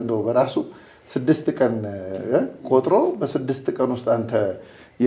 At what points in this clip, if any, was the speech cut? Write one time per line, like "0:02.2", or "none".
none